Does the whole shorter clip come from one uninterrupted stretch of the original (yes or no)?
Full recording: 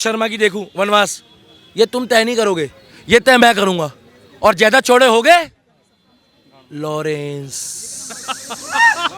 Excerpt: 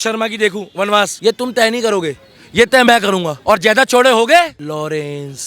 no